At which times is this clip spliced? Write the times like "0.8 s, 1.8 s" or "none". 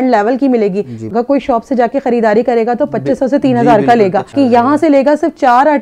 1.0 s, 4.3 s